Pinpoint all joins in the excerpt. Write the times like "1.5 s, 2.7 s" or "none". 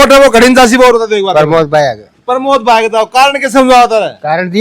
none

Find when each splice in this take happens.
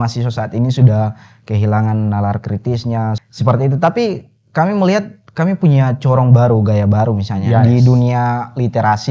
3.2 s

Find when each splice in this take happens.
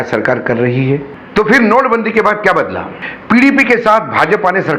1.2 s

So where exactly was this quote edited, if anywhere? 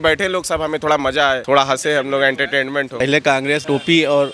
1.4 s, 3.3 s

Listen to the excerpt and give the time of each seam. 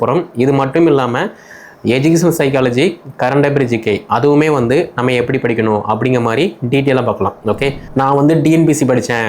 7.8 s

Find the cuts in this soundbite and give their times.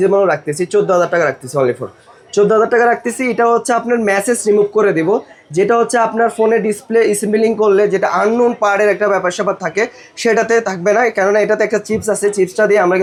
none

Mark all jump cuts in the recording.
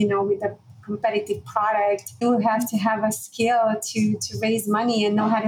2.2 s

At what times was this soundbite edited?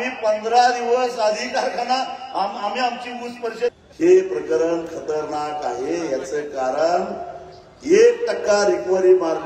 3.7 s

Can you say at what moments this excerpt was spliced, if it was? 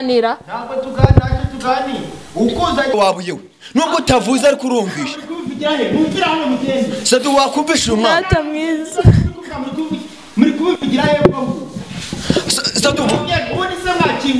2.9 s

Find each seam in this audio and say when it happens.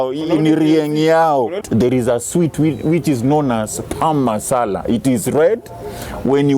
1.6 s

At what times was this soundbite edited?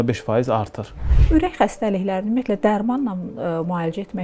1.2 s

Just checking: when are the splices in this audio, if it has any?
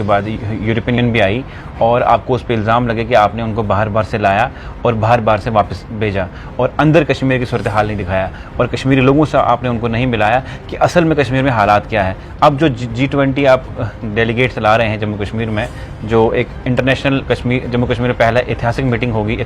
1.0 s

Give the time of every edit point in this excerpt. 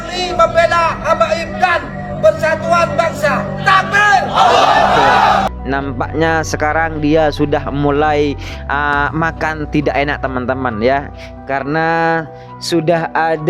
5.5 s

